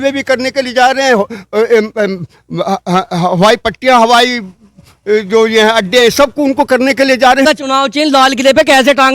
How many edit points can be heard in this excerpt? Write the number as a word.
one